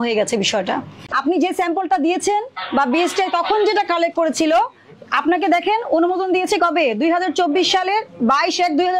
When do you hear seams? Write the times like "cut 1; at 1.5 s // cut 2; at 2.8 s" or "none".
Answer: cut 1; at 1.1 s